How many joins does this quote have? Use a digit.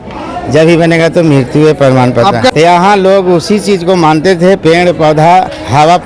1